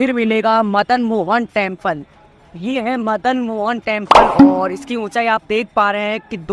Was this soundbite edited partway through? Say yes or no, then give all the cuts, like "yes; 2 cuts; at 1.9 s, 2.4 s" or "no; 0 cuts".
no; 0 cuts